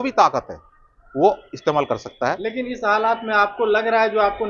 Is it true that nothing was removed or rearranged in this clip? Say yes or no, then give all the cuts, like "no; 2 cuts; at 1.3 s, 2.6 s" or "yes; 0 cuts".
yes; 0 cuts